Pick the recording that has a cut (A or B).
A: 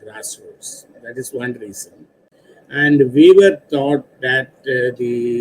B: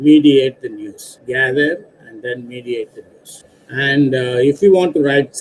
A